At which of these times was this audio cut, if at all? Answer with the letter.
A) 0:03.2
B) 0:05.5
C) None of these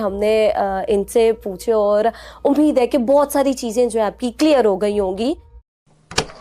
B